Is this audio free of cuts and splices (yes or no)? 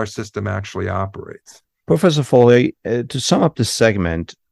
yes